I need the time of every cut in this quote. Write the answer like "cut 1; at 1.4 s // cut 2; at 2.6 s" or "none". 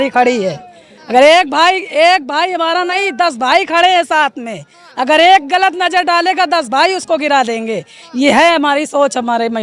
none